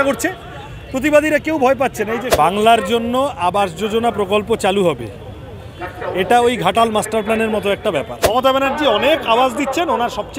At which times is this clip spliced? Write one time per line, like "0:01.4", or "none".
0:02.3
0:08.2